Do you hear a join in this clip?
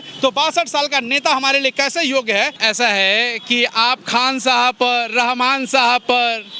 yes; 1 cut; at 2.6 s

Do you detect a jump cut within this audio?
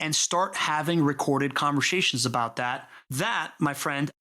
yes; 1 cut; at 3.1 s

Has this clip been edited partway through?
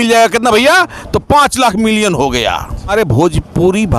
yes; 1 cut; at 2.9 s

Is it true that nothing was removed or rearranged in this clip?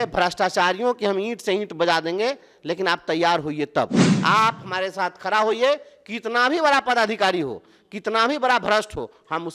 no; 1 cut; at 4.0 s

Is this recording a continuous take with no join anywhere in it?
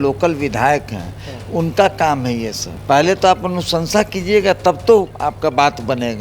no; 2 cuts; at 2.7 s, 5.1 s

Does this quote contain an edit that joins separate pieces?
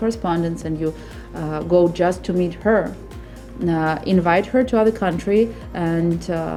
no; 0 cuts

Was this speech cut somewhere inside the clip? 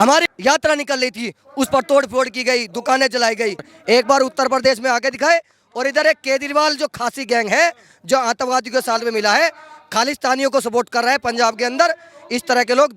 yes; 1 cut; at 3.7 s

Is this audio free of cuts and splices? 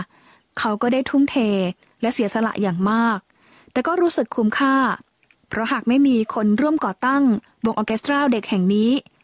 yes; 0 cuts

